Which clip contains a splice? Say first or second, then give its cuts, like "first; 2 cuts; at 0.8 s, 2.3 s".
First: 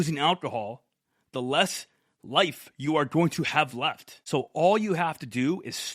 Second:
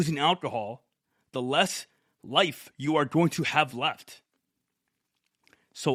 first; 1 cut; at 4.1 s